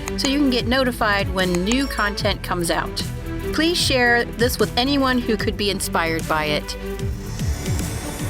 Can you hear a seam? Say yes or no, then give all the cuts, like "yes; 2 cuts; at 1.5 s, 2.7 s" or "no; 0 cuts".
yes; 1 cut; at 6.7 s